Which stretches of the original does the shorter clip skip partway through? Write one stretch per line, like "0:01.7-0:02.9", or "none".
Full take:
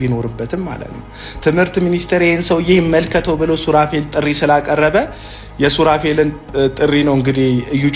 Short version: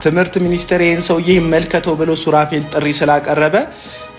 none